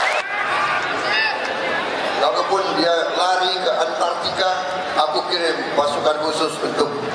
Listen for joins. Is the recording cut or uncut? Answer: uncut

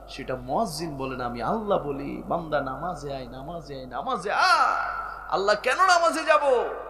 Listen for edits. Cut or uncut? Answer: uncut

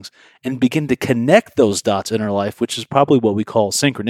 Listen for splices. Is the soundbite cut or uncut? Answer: uncut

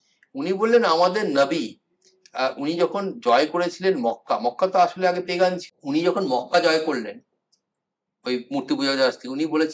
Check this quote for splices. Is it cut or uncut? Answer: cut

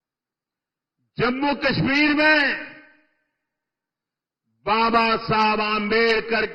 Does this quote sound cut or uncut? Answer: uncut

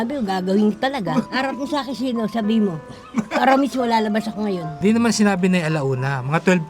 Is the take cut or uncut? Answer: cut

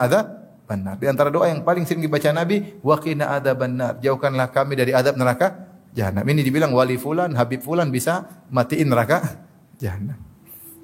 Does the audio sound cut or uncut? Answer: uncut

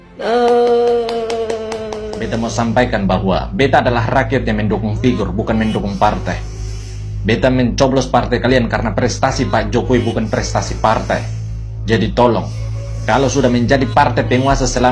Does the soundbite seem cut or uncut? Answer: cut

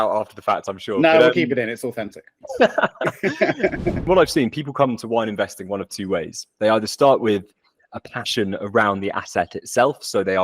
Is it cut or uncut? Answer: cut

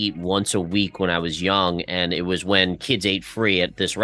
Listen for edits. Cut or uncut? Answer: uncut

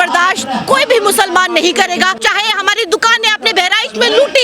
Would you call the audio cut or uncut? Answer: cut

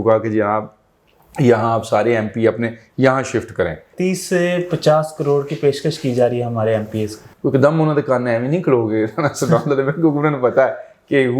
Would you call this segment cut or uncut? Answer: cut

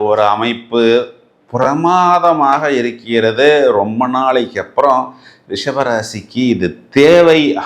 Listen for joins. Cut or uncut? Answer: uncut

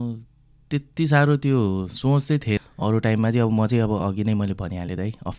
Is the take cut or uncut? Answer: cut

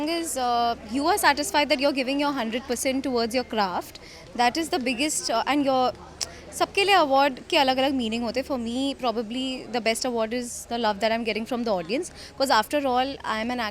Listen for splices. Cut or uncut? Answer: uncut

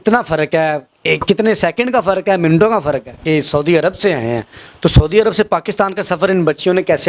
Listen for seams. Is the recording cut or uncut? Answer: cut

